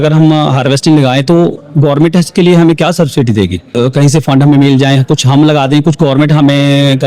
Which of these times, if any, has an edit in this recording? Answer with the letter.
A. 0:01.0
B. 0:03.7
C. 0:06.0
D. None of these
B